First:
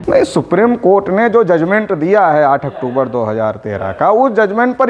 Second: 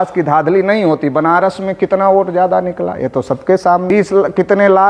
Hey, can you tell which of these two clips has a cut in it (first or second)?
second